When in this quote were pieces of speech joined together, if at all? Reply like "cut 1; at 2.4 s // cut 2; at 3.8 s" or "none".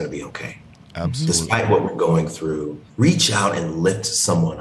cut 1; at 2.8 s